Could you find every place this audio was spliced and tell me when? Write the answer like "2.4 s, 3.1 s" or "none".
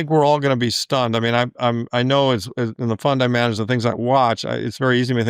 none